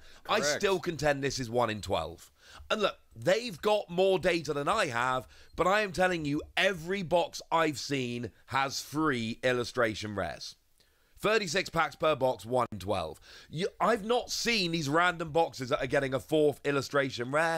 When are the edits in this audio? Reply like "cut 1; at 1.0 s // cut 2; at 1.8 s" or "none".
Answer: cut 1; at 12.8 s